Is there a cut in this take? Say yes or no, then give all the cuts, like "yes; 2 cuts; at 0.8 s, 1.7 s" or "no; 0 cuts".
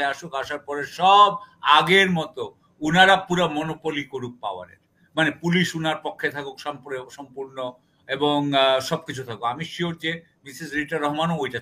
no; 0 cuts